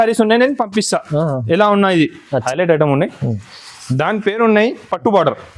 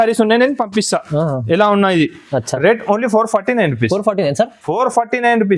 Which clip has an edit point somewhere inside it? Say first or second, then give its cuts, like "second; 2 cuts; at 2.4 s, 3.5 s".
first; 1 cut; at 2.5 s